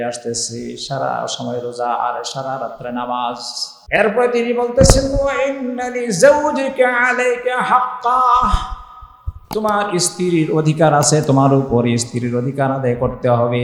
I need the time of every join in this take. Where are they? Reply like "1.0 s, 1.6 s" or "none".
3.8 s